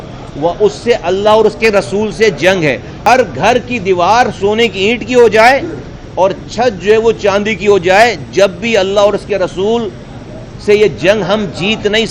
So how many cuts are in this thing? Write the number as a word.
one